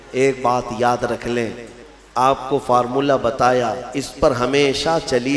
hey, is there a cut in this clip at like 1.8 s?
yes; 1 cut; at 1.8 s

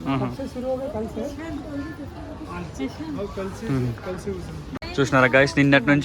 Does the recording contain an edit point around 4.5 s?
no; 0 cuts

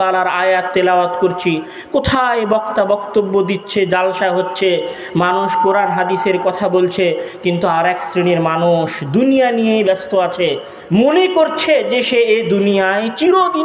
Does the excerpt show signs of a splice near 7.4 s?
no; 0 cuts

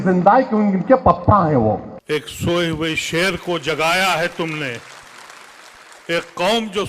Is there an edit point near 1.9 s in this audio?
yes; 1 cut; at 1.9 s

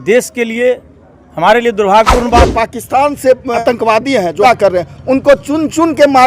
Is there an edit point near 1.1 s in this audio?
no; 3 cuts; at 2.4 s, 3.6 s, 4.4 s

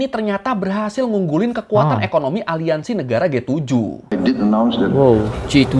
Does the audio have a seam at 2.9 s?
no; 1 cut; at 4.1 s

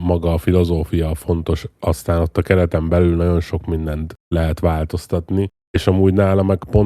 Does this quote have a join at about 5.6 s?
yes; 2 cuts; at 4.1 s, 5.6 s

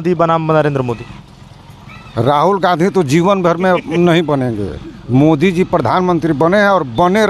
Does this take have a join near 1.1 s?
no; 0 cuts

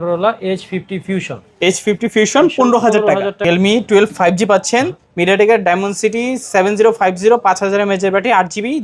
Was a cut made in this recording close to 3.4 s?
yes; 1 cut; at 3.4 s

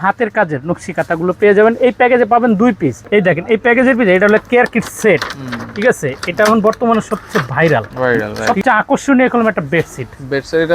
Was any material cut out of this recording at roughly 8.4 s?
yes; 2 cuts; at 3.0 s, 8.4 s

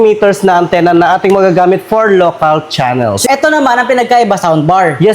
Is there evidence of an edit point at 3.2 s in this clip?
yes; 1 cut; at 3.2 s

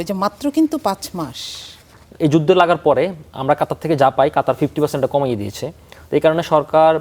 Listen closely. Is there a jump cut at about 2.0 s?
yes; 1 cut; at 2.0 s

